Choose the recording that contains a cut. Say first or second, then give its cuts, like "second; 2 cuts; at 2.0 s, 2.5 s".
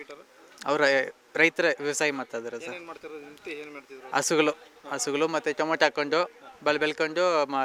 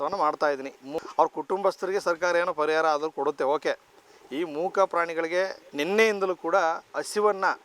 second; 2 cuts; at 0.9 s, 5.6 s